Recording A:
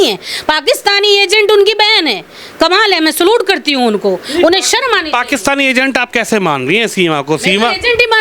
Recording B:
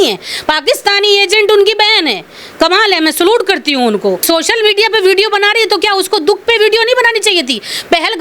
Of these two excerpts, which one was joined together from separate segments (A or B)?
B